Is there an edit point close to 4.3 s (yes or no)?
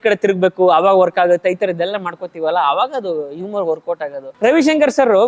yes